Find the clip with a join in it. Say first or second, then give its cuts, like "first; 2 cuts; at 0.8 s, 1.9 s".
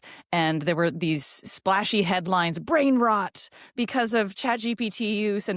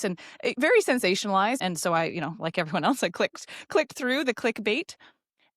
second; 1 cut; at 1.6 s